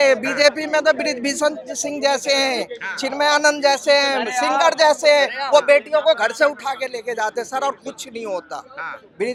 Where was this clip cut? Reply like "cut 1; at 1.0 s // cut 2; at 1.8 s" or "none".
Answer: none